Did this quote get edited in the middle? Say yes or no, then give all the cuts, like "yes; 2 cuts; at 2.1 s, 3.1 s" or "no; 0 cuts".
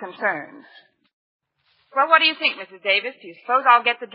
yes; 1 cut; at 1.0 s